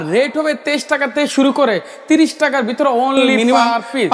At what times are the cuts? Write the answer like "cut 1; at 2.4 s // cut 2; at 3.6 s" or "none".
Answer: none